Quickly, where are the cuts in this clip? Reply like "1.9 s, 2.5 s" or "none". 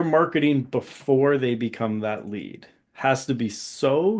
none